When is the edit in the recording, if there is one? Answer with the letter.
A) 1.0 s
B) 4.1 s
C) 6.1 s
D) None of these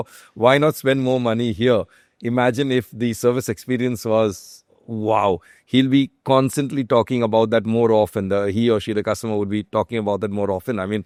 D